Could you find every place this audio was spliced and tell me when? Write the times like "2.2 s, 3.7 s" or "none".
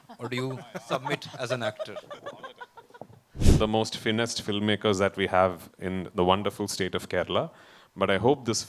3.4 s